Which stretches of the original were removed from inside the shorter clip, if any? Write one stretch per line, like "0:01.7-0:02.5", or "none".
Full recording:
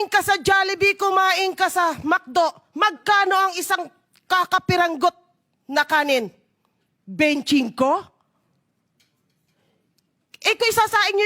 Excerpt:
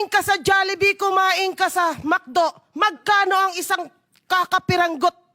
none